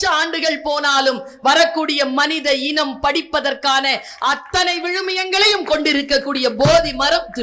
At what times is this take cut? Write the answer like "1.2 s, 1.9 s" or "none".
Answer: none